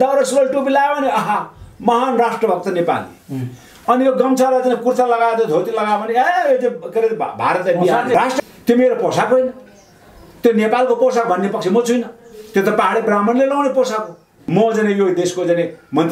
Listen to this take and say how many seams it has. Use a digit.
2